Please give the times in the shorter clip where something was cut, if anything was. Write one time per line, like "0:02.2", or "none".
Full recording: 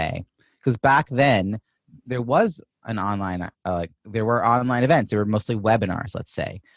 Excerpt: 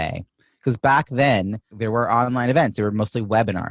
0:01.7